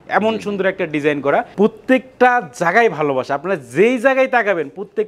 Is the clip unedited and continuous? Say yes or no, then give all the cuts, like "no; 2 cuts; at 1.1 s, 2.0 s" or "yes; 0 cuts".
no; 1 cut; at 1.5 s